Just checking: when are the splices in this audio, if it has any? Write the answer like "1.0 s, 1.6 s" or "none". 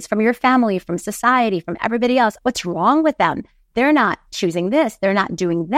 2.4 s, 4.2 s